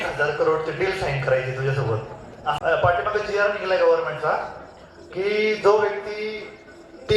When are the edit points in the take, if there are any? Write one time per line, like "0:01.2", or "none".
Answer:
0:02.6